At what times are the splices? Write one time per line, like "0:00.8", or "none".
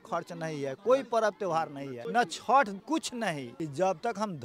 0:01.9
0:03.2